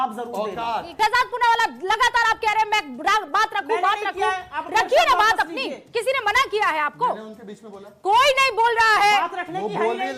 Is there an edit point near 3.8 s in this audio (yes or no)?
no